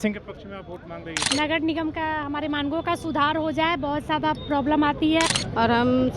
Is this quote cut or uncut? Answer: cut